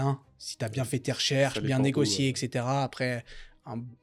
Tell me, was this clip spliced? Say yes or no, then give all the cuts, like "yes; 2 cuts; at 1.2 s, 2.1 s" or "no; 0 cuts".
no; 0 cuts